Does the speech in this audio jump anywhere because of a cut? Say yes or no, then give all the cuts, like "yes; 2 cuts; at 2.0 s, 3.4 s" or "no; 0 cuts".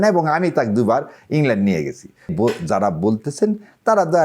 yes; 1 cut; at 2.3 s